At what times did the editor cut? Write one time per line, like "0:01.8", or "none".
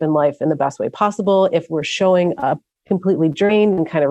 0:02.7